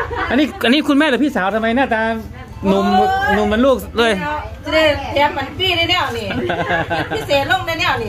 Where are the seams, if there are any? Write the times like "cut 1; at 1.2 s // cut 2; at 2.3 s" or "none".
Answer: none